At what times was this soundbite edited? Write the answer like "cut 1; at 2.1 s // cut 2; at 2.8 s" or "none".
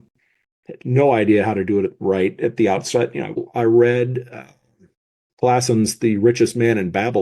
cut 1; at 3.4 s